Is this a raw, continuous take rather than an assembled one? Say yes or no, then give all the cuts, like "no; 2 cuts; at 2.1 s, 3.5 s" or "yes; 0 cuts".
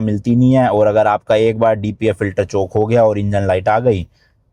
yes; 0 cuts